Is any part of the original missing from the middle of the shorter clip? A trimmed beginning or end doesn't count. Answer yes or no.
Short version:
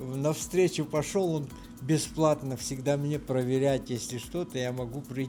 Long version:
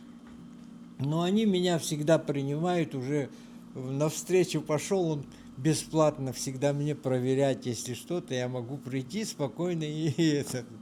no